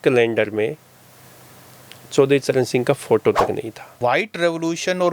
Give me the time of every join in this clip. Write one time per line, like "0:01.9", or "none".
0:03.8